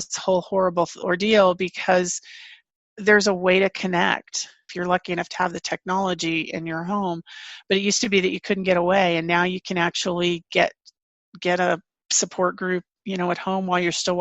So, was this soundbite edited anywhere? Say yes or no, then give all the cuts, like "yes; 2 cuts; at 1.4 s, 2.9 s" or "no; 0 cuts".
yes; 1 cut; at 4.6 s